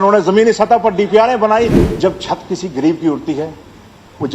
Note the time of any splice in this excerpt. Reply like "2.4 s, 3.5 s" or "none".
1.8 s